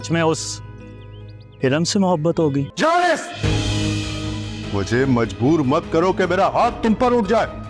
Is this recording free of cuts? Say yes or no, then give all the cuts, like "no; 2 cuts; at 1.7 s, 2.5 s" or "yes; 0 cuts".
no; 1 cut; at 2.7 s